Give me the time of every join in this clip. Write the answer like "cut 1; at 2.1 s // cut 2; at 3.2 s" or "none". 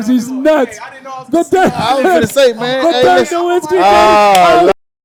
none